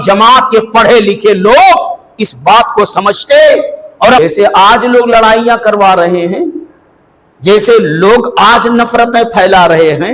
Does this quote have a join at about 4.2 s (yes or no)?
yes